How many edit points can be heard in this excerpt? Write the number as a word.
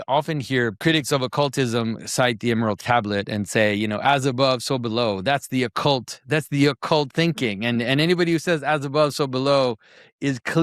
two